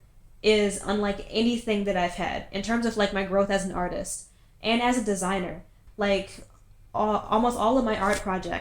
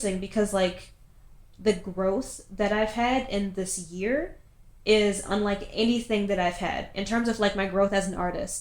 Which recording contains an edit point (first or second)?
first